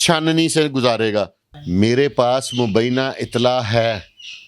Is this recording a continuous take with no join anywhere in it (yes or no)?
no